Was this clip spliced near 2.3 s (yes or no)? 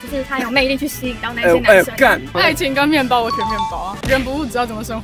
yes